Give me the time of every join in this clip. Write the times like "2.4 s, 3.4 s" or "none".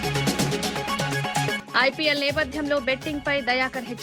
1.5 s